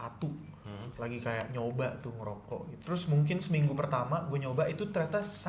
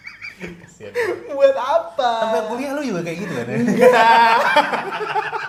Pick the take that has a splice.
first; 1 cut; at 2.8 s

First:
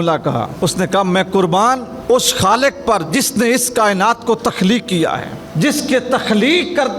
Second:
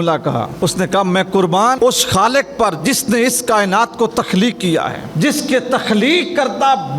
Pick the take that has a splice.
second; 2 cuts; at 1.8 s, 5.0 s

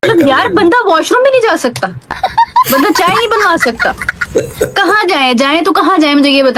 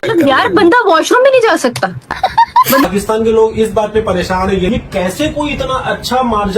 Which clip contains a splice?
second; 2 cuts; at 2.8 s, 4.7 s

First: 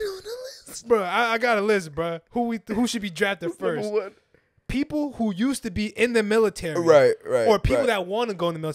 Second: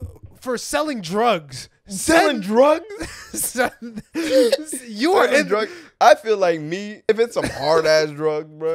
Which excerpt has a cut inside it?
second; 1 cut; at 7.1 s

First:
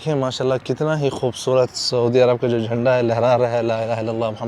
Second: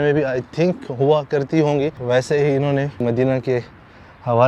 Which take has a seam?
second; 2 cuts; at 2.0 s, 3.0 s

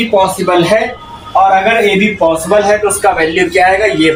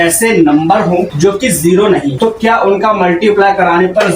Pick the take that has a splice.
second; 2 cuts; at 1.1 s, 2.1 s

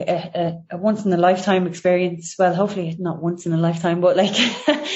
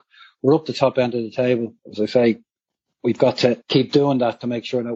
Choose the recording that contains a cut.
second; 2 cuts; at 1.8 s, 3.6 s

